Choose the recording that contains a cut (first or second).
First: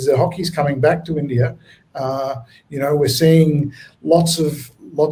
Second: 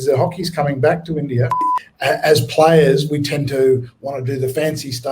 second